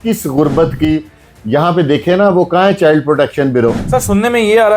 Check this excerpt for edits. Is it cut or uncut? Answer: cut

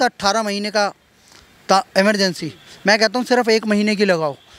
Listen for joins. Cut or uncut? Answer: uncut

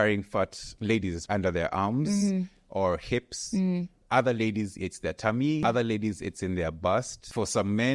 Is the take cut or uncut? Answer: cut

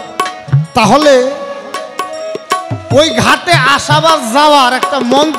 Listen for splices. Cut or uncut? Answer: uncut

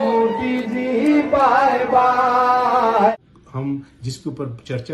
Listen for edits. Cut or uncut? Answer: cut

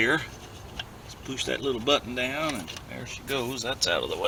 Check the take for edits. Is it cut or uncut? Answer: uncut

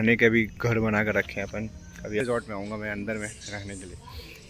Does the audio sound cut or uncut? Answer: cut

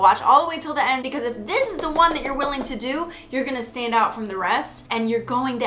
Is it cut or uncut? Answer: cut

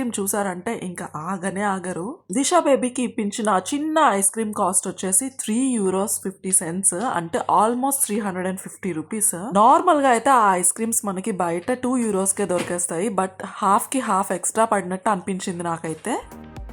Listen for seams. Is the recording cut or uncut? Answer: uncut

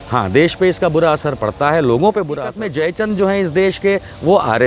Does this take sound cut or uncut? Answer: cut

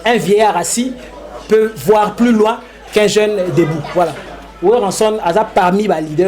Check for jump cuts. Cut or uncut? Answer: cut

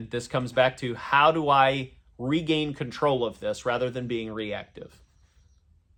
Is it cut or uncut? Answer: uncut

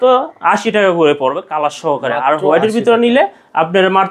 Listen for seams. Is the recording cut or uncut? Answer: uncut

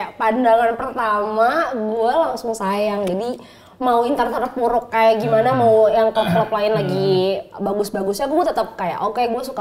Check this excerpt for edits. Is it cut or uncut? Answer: uncut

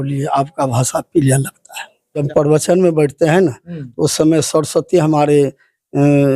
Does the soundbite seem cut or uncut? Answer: cut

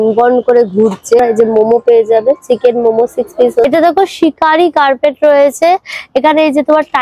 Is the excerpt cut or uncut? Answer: cut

